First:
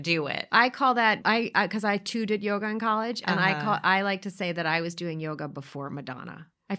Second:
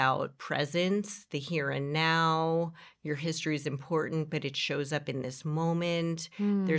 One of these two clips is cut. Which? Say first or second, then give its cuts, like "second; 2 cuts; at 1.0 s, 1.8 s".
first; 1 cut; at 1.2 s